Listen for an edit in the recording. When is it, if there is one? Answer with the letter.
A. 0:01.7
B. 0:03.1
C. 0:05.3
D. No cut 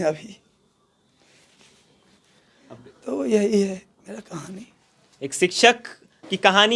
D